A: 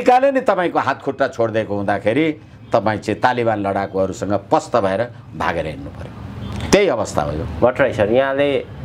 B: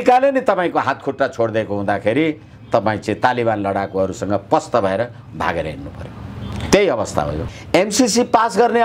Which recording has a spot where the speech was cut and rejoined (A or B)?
B